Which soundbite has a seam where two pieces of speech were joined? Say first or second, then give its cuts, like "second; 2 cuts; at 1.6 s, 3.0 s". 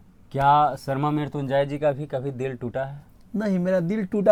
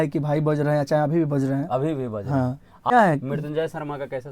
second; 1 cut; at 2.9 s